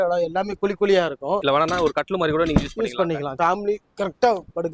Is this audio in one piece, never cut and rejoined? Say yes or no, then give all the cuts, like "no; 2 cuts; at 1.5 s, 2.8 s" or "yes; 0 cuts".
no; 2 cuts; at 1.4 s, 3.3 s